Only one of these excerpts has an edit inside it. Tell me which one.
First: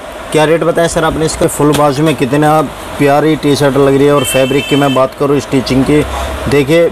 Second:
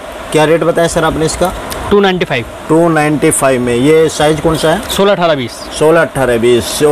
first; 1 cut; at 1.4 s

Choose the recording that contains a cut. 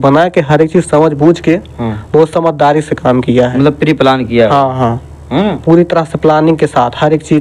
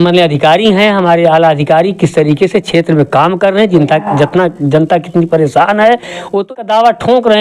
second; 1 cut; at 6.5 s

